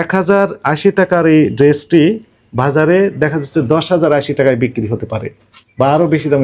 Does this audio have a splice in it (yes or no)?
no